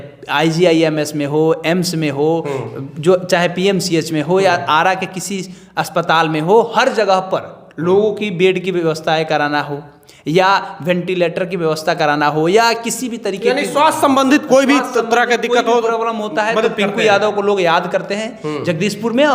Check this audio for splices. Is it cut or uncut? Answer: uncut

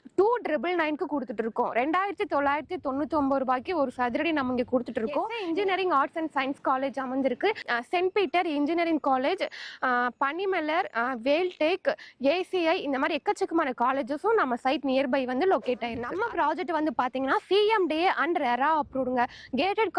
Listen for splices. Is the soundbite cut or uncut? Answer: cut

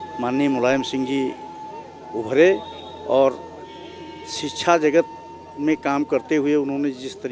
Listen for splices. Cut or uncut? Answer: uncut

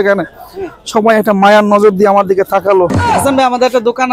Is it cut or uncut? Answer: uncut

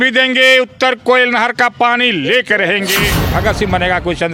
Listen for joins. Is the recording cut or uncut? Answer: cut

